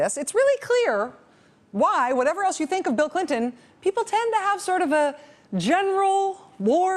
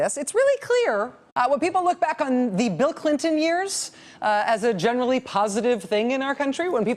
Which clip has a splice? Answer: first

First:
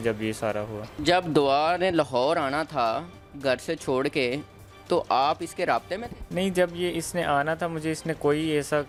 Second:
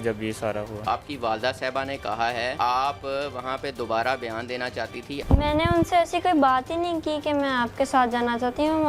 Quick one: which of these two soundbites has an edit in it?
second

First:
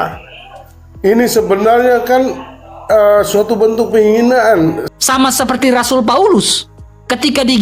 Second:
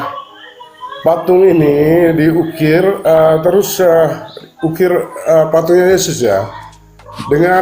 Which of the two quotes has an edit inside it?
first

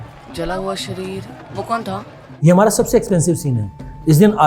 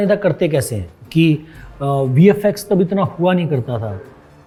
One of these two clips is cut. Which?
first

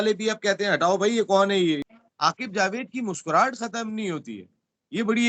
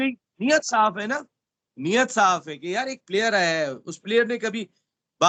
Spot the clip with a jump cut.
first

